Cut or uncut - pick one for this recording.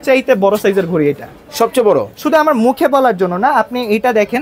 uncut